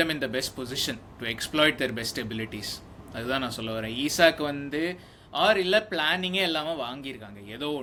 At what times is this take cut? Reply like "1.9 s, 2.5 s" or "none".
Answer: none